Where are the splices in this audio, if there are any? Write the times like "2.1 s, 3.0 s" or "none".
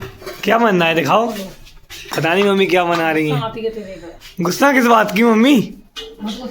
3.2 s